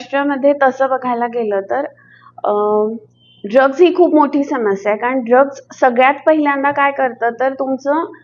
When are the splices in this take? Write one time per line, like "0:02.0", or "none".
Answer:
none